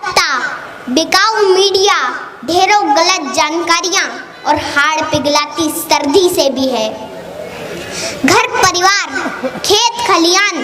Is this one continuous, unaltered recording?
yes; 0 cuts

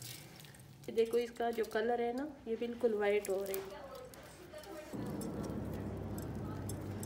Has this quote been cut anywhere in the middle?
yes; 2 cuts; at 0.9 s, 4.9 s

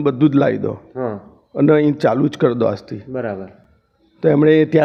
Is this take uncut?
yes; 0 cuts

